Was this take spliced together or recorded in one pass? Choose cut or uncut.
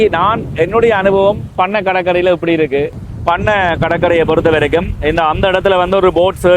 cut